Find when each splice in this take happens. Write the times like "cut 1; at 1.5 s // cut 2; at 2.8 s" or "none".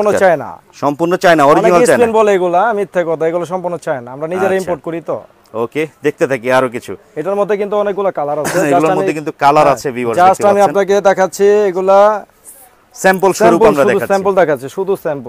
none